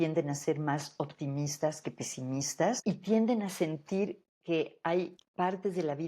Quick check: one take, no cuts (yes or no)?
no